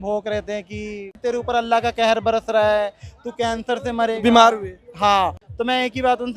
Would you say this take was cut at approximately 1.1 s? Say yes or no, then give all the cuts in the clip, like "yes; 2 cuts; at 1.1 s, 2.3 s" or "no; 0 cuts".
yes; 2 cuts; at 1.1 s, 5.5 s